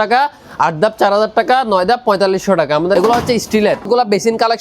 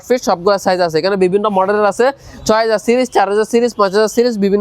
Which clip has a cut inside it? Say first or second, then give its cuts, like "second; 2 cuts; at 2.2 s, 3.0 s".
first; 2 cuts; at 3.0 s, 3.8 s